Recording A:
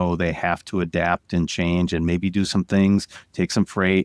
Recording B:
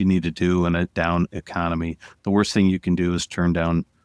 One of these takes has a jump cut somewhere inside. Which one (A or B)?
B